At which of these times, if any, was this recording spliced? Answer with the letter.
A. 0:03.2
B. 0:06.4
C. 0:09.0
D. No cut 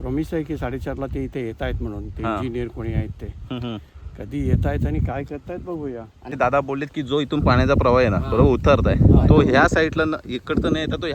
B